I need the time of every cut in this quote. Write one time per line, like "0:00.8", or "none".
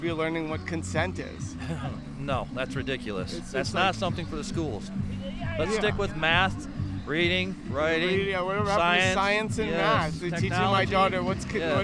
none